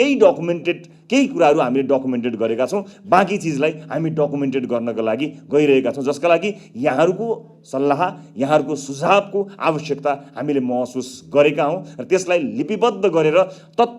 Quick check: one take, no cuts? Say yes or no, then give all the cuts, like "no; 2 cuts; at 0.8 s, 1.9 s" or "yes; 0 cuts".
yes; 0 cuts